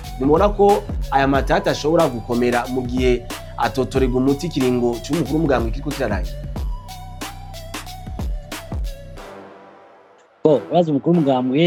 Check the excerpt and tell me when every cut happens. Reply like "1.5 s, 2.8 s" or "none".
none

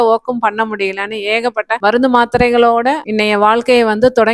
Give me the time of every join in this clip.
1.8 s, 3.1 s

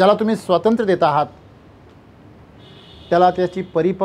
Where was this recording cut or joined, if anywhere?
none

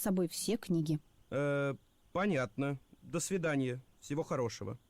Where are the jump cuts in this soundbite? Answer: 1.2 s

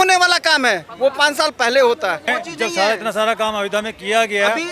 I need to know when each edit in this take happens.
2.3 s

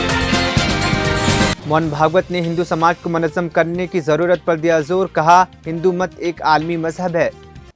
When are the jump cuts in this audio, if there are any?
none

